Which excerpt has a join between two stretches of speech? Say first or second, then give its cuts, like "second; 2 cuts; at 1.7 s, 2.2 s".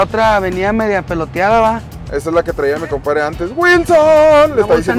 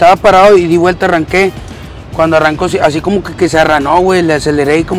first; 1 cut; at 2.0 s